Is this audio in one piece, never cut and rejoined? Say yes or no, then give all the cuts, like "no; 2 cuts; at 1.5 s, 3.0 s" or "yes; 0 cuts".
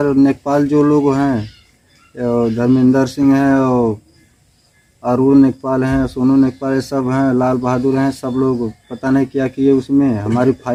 yes; 0 cuts